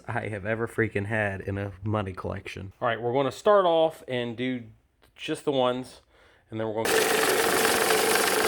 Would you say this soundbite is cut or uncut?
cut